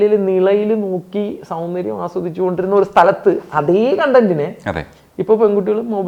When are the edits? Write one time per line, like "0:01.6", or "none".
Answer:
none